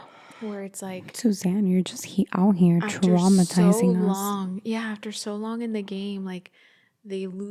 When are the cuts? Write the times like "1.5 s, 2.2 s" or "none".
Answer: none